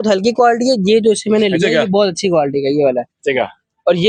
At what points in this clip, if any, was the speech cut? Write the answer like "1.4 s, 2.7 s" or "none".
none